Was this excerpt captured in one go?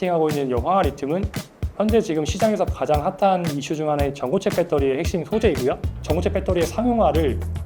no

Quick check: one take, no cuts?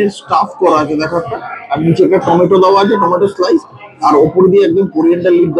yes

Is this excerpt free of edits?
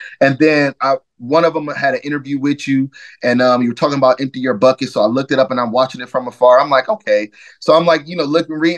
yes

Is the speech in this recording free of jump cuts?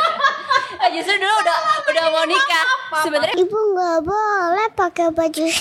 no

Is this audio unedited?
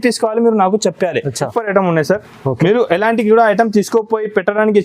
no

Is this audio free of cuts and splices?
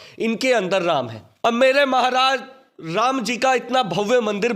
no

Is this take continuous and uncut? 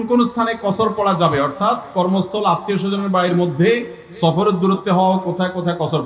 yes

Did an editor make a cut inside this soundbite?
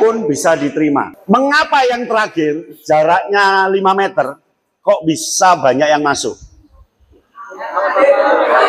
yes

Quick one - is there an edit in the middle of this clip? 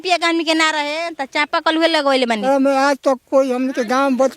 yes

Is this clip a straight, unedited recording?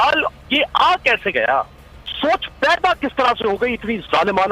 no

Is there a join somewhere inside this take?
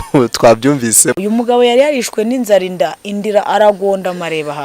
yes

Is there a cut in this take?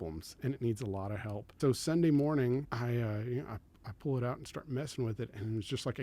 yes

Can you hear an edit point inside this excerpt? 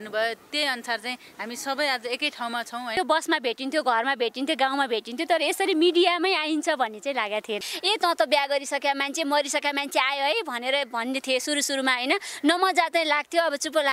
yes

